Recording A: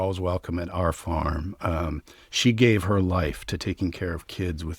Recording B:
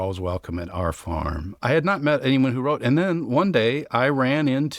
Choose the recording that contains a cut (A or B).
B